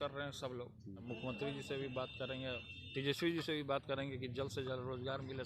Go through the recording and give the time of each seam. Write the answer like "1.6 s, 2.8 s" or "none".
1.0 s